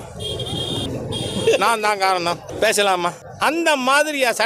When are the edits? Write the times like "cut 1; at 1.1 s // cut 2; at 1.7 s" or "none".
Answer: cut 1; at 0.9 s // cut 2; at 2.5 s // cut 3; at 3.2 s